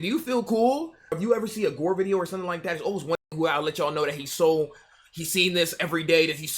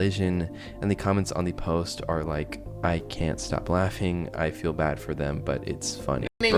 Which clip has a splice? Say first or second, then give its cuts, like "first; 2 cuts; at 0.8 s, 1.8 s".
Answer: first; 1 cut; at 1.2 s